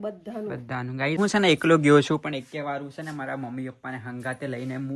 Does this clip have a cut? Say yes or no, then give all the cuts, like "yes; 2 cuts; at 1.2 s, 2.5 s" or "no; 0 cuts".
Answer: yes; 1 cut; at 1.2 s